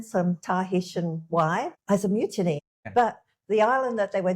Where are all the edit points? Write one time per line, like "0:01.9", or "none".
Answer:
0:01.8
0:02.6

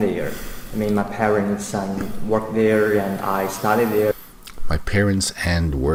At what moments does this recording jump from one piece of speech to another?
none

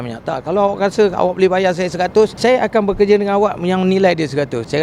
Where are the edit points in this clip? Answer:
none

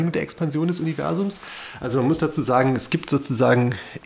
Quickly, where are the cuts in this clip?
none

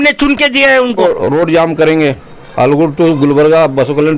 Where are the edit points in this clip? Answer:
0:01.0

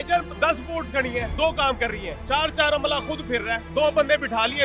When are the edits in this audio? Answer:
0:01.3
0:02.1
0:03.7

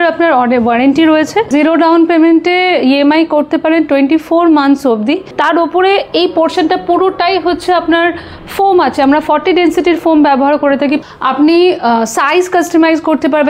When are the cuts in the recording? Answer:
0:01.5
0:05.3
0:11.0

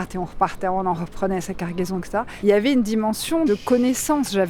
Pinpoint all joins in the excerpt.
0:02.3
0:03.5

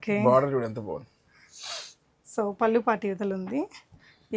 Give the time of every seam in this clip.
none

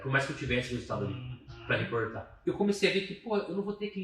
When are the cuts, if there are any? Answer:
0:02.3

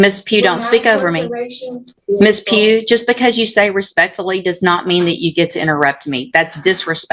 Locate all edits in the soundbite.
0:01.9

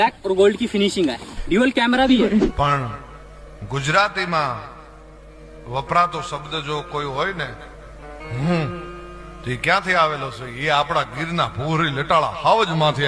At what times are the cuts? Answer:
0:02.5

